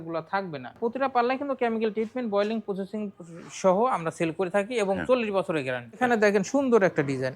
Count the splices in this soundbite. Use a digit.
2